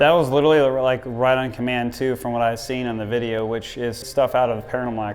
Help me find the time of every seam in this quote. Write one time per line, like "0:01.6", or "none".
0:04.0

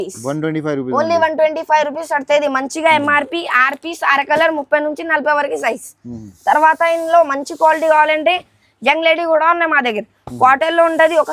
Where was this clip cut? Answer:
none

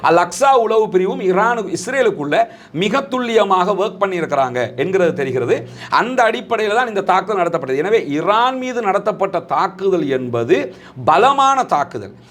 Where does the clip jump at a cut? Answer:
none

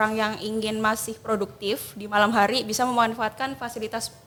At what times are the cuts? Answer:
none

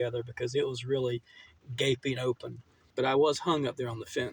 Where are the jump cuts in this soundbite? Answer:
0:02.8

